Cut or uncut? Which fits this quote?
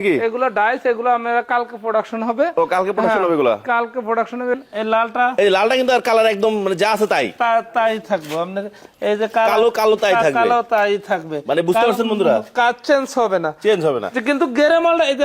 cut